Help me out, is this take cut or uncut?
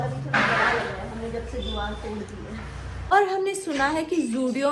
cut